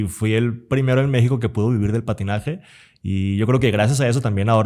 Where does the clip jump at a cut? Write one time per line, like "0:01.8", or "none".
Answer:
none